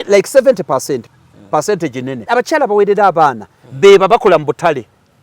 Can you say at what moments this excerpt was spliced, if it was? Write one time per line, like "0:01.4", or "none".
0:02.2